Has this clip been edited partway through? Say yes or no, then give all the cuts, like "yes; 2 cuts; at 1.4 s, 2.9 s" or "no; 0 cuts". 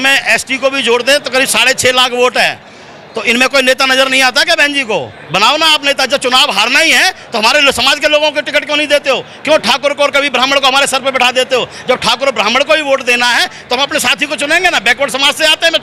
no; 0 cuts